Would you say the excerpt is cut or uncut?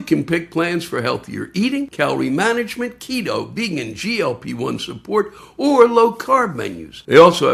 uncut